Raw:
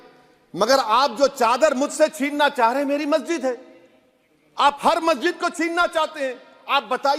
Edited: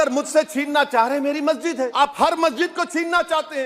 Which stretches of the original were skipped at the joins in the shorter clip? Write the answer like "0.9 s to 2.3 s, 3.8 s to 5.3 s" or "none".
3.6 s to 4.6 s